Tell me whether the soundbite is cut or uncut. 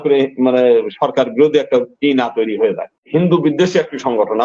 cut